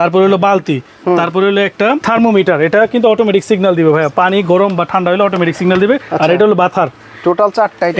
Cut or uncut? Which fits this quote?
uncut